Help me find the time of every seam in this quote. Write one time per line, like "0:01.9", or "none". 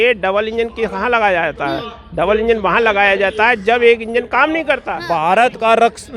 0:04.9